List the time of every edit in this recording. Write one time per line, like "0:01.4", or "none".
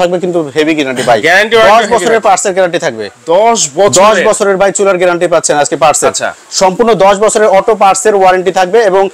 none